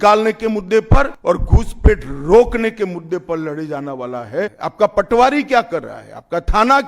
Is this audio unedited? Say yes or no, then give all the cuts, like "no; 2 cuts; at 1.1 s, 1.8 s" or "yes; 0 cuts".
no; 2 cuts; at 1.1 s, 4.6 s